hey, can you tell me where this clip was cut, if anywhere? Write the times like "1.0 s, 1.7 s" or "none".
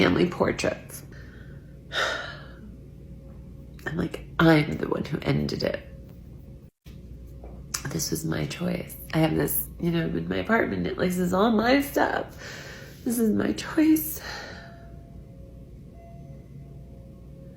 1.1 s